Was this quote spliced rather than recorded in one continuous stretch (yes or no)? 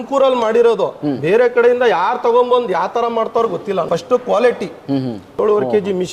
no